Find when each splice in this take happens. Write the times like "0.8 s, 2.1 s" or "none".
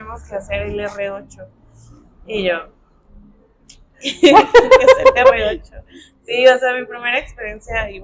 none

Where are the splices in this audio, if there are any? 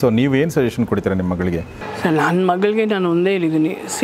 1.8 s

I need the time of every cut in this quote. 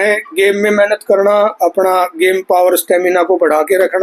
none

